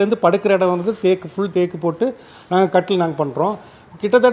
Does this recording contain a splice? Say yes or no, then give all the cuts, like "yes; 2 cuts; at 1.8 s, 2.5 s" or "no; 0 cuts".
no; 0 cuts